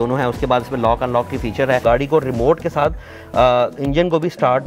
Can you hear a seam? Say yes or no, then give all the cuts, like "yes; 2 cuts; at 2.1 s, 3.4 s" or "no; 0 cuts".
yes; 1 cut; at 1.8 s